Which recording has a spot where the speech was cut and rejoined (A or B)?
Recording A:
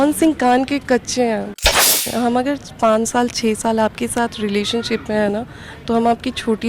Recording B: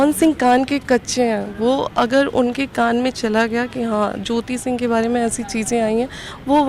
A